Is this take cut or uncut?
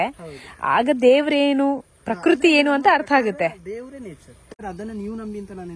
cut